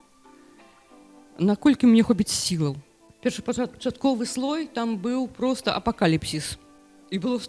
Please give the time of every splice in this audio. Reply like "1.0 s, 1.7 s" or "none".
3.0 s